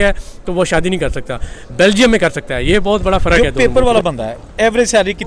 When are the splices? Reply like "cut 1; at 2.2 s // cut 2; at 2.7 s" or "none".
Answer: cut 1; at 3.4 s